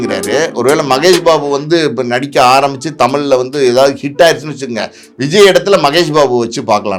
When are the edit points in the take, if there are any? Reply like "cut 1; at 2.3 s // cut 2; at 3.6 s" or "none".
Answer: none